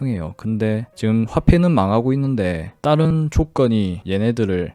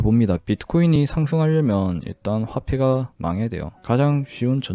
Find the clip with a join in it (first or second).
second